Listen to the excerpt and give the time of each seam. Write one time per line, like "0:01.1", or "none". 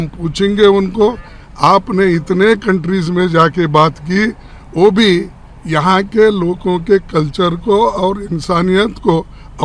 none